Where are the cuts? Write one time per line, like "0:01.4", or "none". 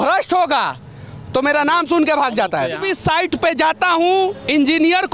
0:02.9